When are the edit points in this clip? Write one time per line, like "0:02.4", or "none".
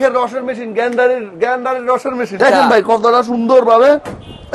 0:02.4